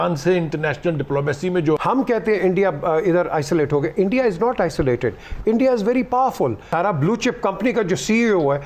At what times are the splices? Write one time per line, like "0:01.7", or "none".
0:01.8
0:06.6